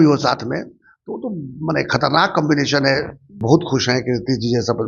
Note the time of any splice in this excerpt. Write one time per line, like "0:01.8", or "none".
0:03.4

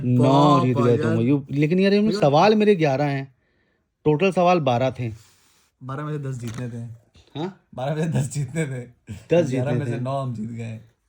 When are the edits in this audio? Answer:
none

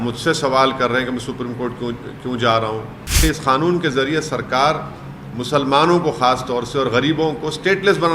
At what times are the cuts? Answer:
0:03.2

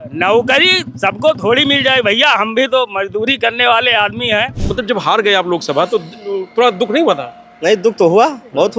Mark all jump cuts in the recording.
0:04.6

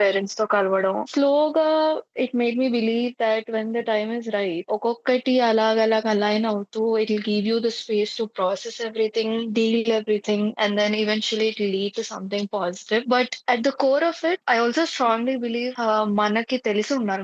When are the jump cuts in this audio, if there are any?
none

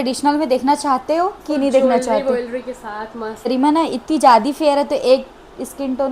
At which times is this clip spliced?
0:03.5

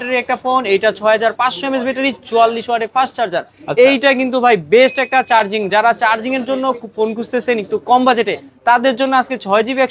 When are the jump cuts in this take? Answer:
none

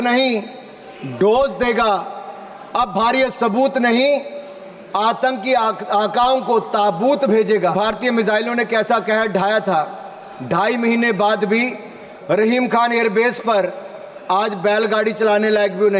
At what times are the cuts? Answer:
0:07.7

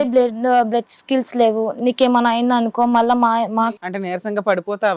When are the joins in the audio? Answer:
0:03.7

